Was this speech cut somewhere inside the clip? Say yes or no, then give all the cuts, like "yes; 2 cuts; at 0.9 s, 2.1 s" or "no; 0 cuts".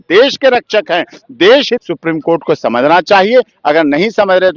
yes; 1 cut; at 1.8 s